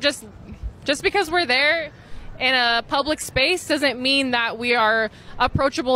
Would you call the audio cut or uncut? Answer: uncut